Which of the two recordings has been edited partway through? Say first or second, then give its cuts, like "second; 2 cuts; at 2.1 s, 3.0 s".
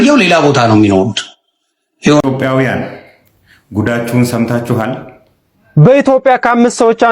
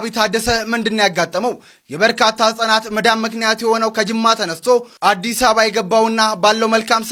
first; 1 cut; at 2.2 s